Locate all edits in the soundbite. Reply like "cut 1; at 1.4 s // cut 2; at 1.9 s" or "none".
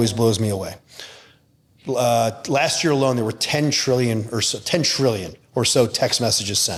none